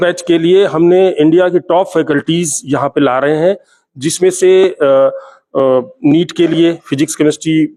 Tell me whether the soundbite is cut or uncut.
uncut